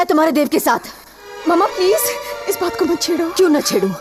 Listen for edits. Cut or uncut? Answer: uncut